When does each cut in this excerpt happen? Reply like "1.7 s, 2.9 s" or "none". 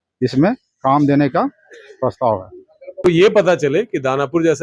3.0 s